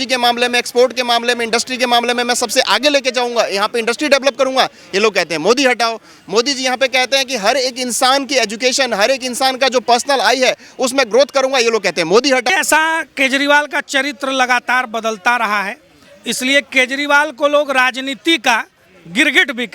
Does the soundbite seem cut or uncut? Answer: cut